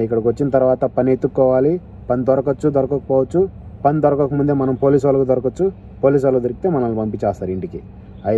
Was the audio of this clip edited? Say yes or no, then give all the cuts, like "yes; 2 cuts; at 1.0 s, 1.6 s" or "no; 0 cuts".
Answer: no; 0 cuts